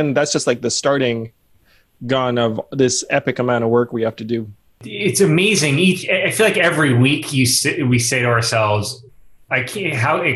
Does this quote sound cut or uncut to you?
cut